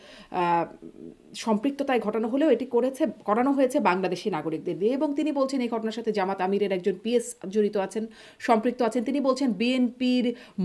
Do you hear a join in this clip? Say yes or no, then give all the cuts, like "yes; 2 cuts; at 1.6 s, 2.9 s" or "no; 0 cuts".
no; 0 cuts